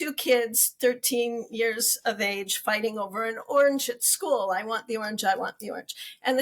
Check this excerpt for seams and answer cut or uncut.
uncut